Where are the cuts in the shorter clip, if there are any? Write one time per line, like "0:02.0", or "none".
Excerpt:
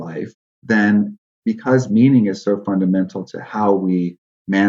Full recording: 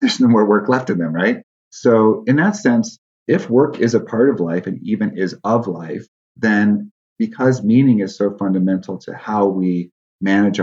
none